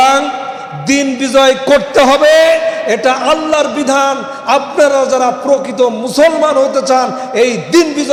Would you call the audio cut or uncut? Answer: uncut